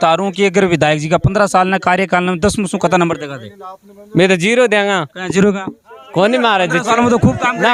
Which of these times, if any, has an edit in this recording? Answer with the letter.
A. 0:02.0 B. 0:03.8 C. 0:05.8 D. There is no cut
D